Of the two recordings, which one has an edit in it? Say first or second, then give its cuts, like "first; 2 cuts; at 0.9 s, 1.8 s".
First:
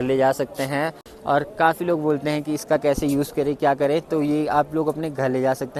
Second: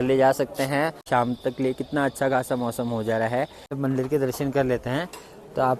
second; 2 cuts; at 1.0 s, 3.7 s